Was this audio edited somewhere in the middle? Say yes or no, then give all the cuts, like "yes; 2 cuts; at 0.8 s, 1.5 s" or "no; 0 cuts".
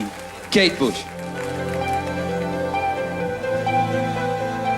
yes; 1 cut; at 1.2 s